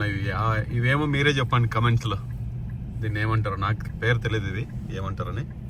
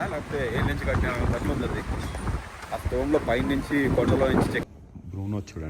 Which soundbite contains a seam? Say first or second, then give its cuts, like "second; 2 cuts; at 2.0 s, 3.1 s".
second; 1 cut; at 4.6 s